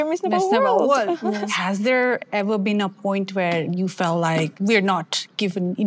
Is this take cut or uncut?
cut